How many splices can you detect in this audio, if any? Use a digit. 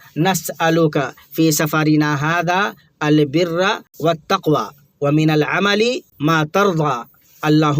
2